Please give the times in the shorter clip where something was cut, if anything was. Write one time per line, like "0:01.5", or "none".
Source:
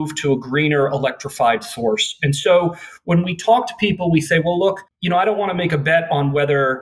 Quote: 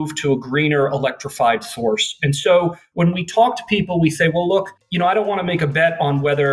0:02.8